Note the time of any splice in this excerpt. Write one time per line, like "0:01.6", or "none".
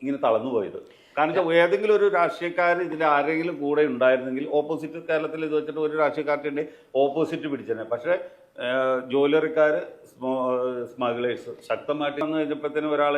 0:12.2

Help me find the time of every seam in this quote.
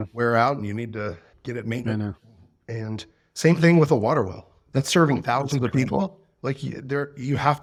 none

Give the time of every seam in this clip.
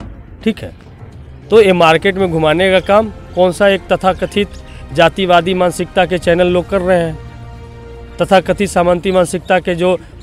none

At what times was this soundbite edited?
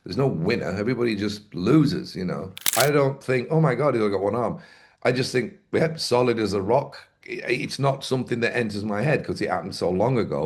0:02.6

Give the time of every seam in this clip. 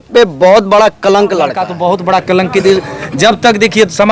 0:01.7

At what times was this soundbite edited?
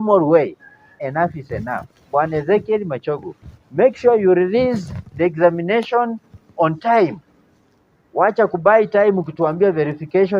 0:01.0

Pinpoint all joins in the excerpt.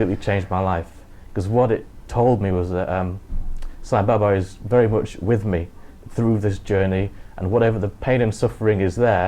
none

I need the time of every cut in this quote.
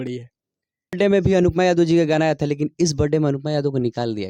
0:01.0

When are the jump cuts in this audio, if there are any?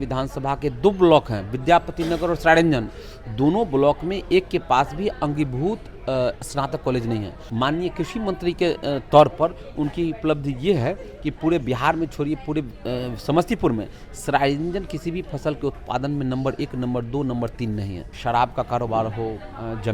0:07.4
0:18.0

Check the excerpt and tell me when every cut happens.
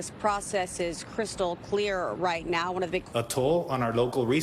0:03.1

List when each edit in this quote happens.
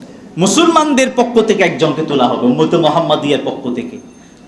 none

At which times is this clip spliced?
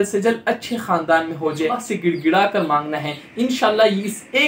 0:01.8

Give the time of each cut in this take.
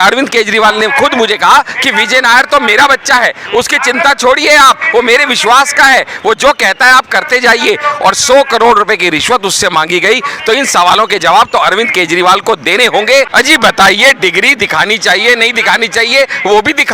0:13.3

